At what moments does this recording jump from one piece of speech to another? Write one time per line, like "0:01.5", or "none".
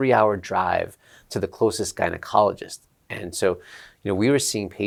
none